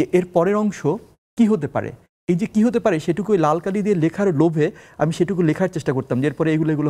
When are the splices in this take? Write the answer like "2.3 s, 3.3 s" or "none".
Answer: none